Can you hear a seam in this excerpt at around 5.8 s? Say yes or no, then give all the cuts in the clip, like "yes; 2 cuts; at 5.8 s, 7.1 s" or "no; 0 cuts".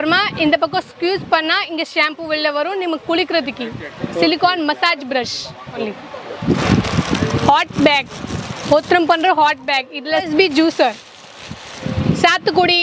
yes; 3 cuts; at 5.8 s, 10.3 s, 11.8 s